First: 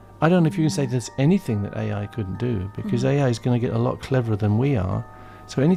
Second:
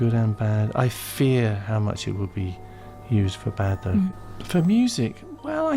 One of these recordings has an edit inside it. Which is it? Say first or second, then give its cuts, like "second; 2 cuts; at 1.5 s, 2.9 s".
second; 1 cut; at 4.1 s